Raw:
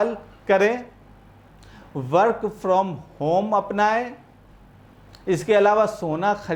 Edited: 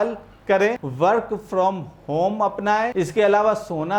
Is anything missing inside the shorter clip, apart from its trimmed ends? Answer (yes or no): yes